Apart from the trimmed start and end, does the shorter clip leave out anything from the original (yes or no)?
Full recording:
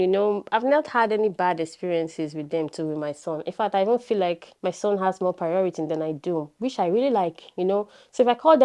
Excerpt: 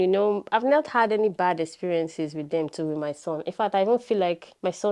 no